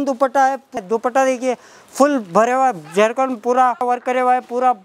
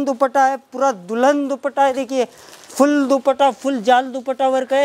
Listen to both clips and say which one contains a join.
first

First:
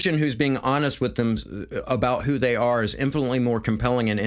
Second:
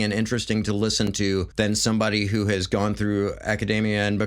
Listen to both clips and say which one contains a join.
second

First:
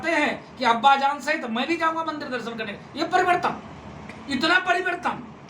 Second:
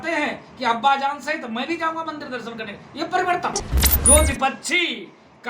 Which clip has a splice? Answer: second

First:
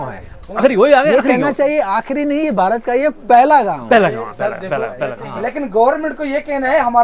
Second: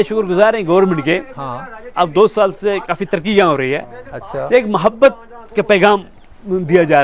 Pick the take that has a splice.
first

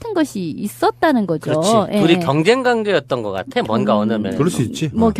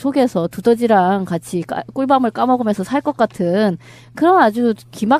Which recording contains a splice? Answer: first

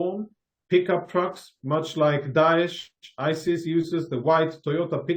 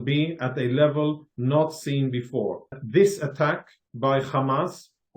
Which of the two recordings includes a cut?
second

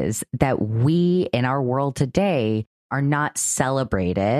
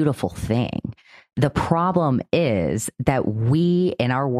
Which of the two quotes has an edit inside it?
first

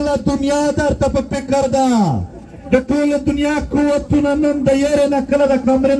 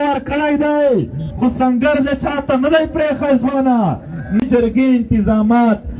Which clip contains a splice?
second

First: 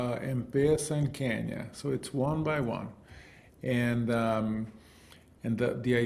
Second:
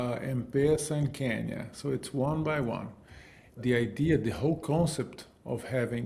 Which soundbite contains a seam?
second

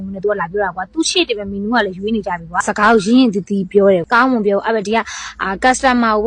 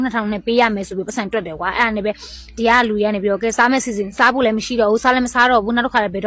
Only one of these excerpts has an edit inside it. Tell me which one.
first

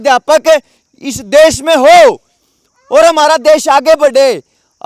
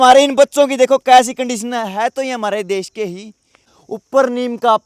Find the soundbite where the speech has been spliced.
second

